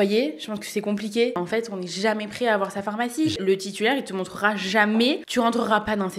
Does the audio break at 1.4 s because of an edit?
yes; 3 cuts; at 1.4 s, 3.4 s, 5.2 s

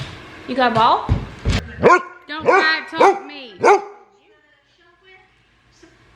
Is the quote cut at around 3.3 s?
no; 1 cut; at 1.7 s

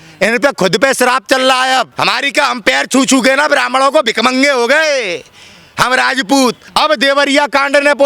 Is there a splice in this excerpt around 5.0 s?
no; 2 cuts; at 1.9 s, 6.6 s

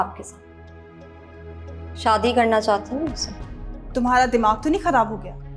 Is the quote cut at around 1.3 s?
no; 1 cut; at 3.8 s

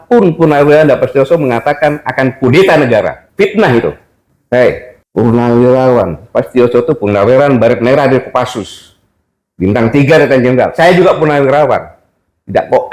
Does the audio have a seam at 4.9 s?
yes; 1 cut; at 4.9 s

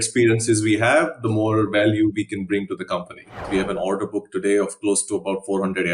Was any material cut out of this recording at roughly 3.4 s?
yes; 1 cut; at 3.4 s

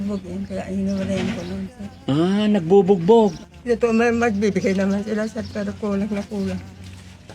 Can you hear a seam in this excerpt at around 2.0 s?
no; 1 cut; at 3.5 s

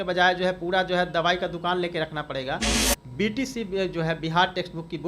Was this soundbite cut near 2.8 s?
yes; 1 cut; at 2.8 s

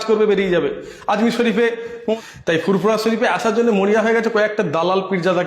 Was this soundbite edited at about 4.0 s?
no; 1 cut; at 2.1 s

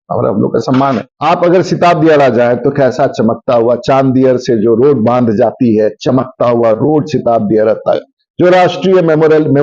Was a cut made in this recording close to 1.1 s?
yes; 1 cut; at 1.1 s

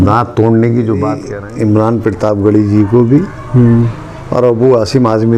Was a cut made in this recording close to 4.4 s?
no; 1 cut; at 1.3 s

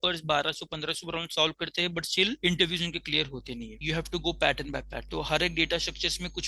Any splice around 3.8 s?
yes; 1 cut; at 3.8 s

